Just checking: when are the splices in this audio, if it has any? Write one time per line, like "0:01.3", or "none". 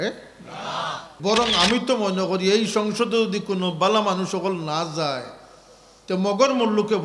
0:01.1